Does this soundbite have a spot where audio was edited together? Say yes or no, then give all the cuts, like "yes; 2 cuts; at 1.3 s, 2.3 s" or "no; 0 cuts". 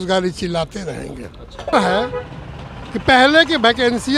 yes; 1 cut; at 1.7 s